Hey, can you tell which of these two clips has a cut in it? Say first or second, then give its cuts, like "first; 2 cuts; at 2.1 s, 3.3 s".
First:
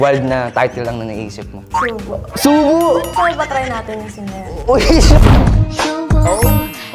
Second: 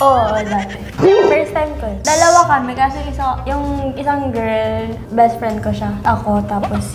second; 3 cuts; at 0.9 s, 2.0 s, 6.0 s